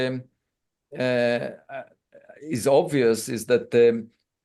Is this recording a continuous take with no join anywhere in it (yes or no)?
yes